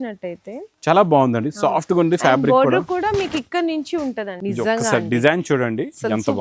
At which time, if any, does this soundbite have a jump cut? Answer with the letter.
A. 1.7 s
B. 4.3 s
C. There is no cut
B